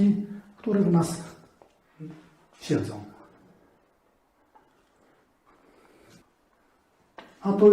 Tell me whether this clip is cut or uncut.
cut